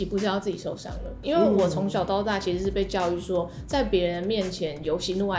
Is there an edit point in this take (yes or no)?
yes